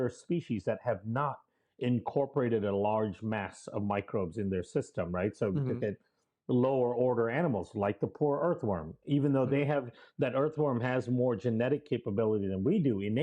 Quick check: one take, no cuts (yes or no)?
yes